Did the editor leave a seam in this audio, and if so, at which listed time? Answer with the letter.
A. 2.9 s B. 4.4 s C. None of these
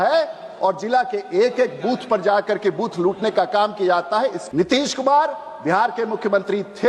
B